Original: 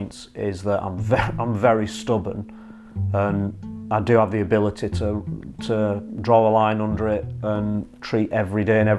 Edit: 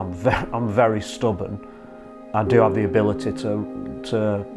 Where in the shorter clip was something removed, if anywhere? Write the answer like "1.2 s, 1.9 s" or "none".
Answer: 2.1 s